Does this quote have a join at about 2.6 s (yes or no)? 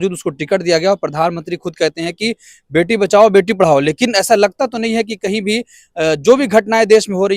no